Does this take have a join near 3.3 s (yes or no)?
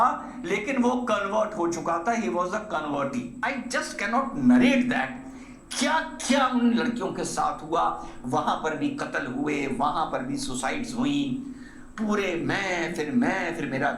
yes